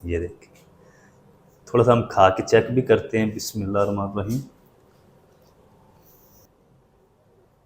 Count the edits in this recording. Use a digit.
1